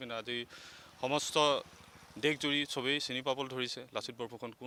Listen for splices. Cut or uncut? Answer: uncut